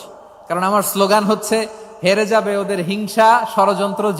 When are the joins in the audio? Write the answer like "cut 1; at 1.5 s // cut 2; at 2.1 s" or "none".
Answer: none